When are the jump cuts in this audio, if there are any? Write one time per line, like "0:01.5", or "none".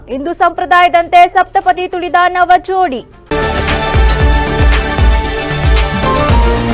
0:03.1